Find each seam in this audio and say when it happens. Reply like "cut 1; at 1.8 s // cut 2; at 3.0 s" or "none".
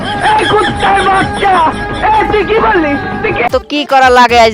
cut 1; at 3.5 s